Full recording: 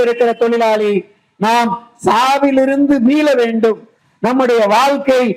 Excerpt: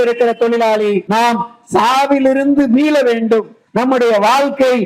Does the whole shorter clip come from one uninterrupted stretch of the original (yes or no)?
no